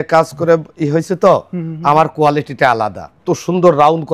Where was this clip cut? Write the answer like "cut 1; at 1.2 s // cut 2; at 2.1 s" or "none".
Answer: cut 1; at 3.2 s